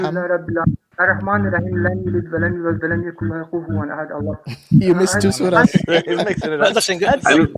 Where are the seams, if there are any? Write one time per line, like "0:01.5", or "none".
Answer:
0:00.9